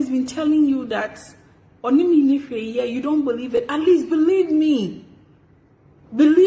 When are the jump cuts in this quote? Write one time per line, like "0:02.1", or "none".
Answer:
none